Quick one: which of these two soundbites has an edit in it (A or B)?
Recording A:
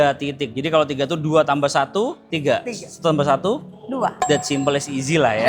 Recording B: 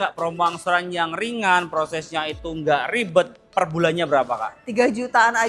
A